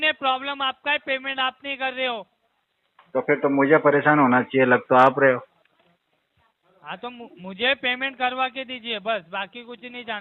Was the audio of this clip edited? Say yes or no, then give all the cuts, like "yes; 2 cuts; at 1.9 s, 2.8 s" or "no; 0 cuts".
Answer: no; 0 cuts